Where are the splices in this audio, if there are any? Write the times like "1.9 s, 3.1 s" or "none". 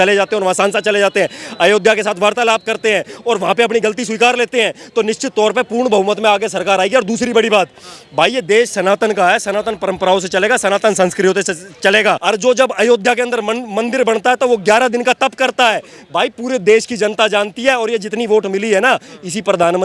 12.2 s